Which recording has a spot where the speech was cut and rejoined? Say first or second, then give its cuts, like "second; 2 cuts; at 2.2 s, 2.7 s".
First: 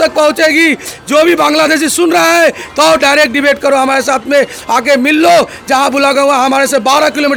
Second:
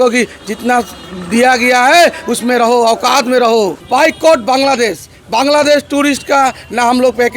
second; 1 cut; at 3.8 s